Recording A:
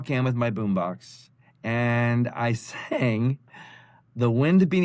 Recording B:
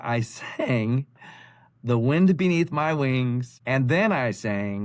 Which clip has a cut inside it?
B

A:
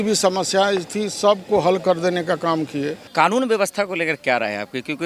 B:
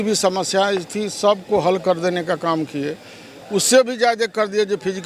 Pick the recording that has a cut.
A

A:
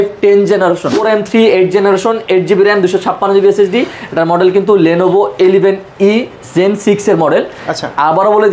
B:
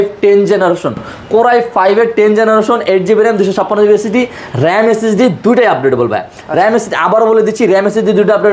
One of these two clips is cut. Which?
A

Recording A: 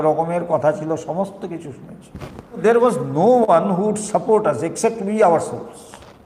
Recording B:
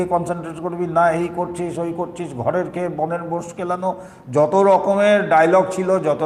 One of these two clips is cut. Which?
A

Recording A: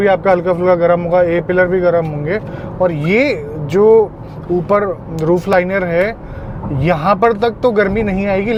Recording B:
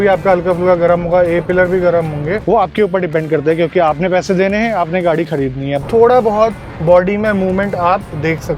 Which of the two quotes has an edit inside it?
B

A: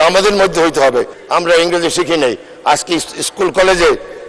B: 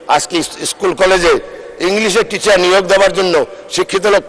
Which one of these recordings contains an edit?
A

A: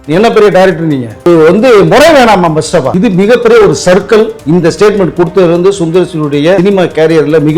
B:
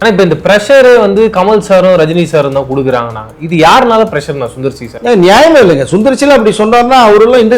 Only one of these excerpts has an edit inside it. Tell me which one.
A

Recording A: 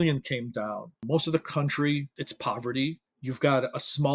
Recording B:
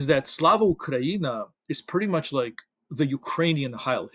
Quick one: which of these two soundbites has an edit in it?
A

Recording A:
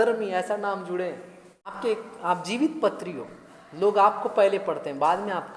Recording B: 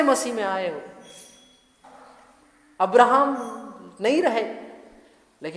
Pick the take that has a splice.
A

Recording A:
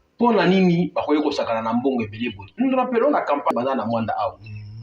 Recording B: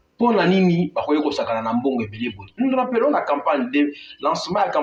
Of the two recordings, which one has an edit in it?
A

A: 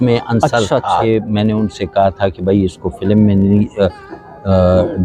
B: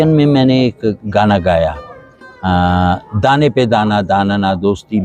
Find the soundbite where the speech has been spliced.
A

